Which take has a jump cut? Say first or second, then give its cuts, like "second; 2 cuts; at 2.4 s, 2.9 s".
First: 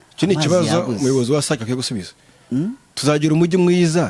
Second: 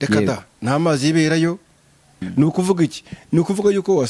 second; 1 cut; at 2.3 s